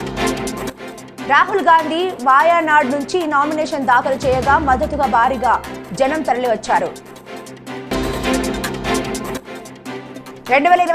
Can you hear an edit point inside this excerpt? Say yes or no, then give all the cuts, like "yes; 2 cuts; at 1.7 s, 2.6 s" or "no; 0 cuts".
yes; 1 cut; at 1.1 s